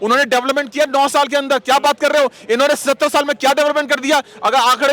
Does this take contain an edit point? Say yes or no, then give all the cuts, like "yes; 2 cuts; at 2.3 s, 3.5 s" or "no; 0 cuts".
no; 0 cuts